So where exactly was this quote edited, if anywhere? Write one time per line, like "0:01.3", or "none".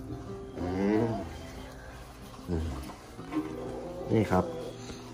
none